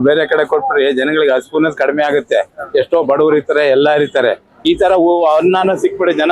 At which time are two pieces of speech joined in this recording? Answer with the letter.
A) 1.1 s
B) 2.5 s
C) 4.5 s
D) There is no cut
C